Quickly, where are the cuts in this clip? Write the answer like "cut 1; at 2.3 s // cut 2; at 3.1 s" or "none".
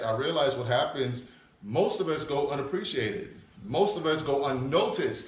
none